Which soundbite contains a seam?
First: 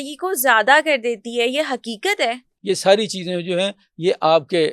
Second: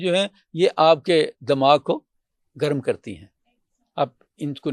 first; 1 cut; at 2.5 s

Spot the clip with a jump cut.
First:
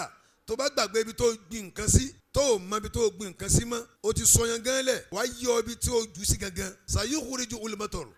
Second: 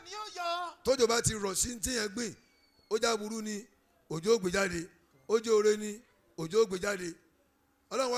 first; 4 cuts; at 2.2 s, 3.9 s, 5.1 s, 6.8 s

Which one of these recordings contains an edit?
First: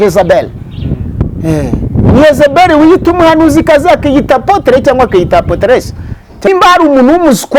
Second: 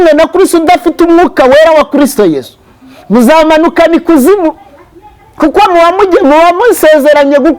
first; 1 cut; at 6.5 s

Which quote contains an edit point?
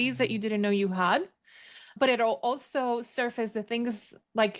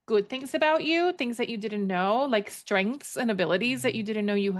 first; 1 cut; at 1.9 s

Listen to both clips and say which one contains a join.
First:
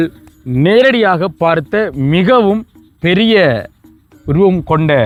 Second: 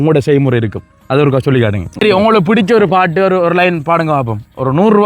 second; 1 cut; at 2.0 s

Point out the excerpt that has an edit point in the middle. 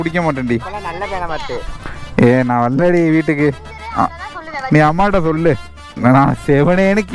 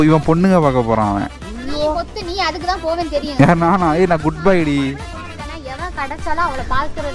first; 1 cut; at 5.9 s

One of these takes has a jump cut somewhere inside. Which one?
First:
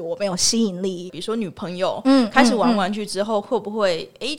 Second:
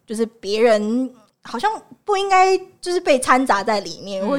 first; 1 cut; at 1.1 s

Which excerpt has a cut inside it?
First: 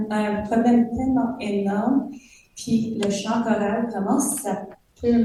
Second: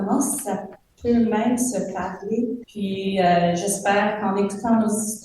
second; 1 cut; at 2.7 s

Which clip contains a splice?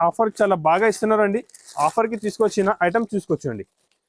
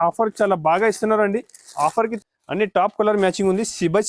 second; 1 cut; at 2.2 s

